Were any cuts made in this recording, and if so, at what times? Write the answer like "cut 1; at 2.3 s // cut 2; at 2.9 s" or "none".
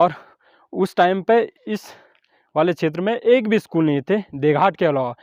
none